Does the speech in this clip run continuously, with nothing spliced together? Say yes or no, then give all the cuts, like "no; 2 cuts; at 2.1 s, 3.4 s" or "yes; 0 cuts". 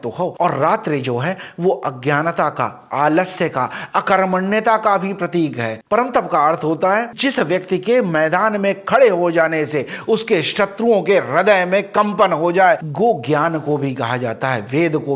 no; 2 cuts; at 5.8 s, 12.9 s